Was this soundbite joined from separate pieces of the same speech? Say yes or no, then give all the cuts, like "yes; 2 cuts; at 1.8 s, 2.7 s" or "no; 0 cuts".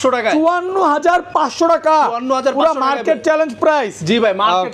no; 0 cuts